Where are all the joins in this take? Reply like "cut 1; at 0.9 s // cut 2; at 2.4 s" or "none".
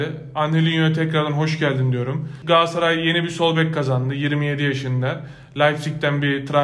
cut 1; at 2.4 s